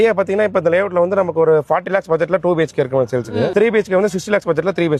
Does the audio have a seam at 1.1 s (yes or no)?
no